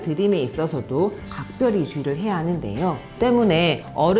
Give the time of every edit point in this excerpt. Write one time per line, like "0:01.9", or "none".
0:03.1